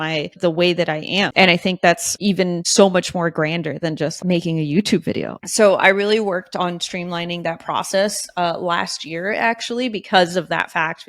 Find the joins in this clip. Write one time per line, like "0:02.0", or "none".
0:01.3
0:02.4
0:04.2
0:05.3